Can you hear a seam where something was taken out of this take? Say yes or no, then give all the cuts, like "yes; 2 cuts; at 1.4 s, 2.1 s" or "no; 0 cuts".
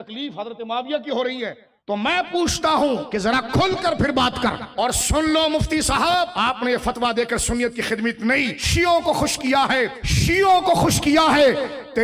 yes; 6 cuts; at 1.7 s, 3.1 s, 4.6 s, 6.3 s, 8.6 s, 10.1 s